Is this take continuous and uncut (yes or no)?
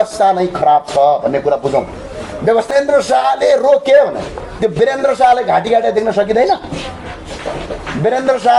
no